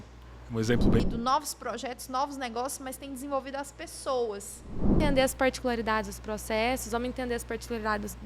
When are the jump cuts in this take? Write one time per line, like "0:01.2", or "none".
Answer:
0:01.0
0:05.0